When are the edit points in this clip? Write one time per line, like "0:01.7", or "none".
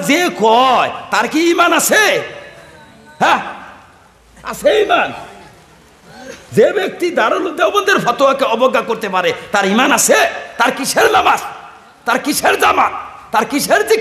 none

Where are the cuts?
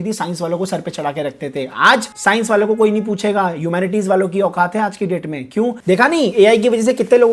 0:02.1
0:05.8

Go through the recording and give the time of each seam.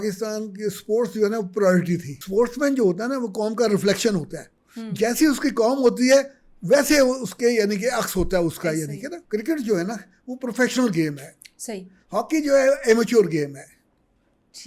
0:02.1
0:09.2

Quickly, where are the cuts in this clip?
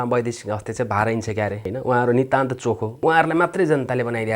0:01.6
0:02.9

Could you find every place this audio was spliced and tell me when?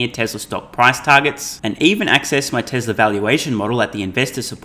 none

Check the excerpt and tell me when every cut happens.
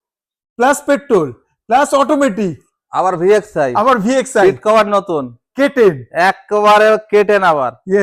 none

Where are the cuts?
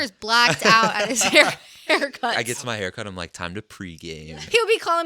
0:02.3
0:04.2

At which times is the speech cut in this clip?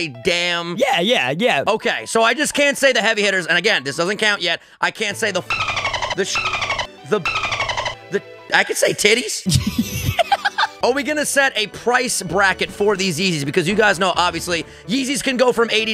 0:01.7
0:09.3
0:10.7

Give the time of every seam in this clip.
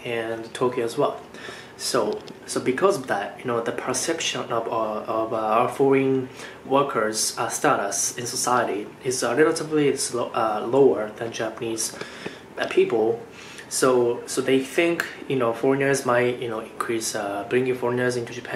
none

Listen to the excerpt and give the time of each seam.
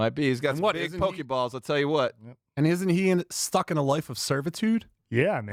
none

